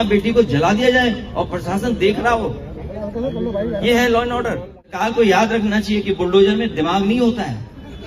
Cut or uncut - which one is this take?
cut